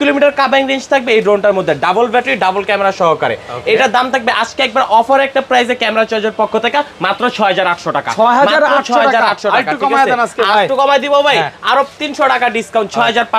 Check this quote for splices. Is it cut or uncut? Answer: uncut